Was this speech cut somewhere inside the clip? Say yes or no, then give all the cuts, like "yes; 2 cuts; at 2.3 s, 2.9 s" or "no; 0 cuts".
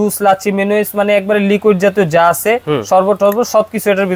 no; 0 cuts